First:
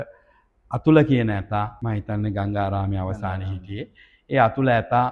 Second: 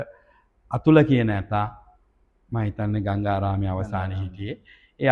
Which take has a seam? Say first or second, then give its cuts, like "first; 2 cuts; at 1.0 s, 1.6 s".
first; 1 cut; at 1.8 s